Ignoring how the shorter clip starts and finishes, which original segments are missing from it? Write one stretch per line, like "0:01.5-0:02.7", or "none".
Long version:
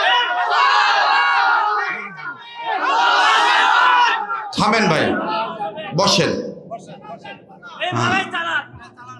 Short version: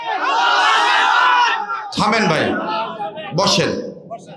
none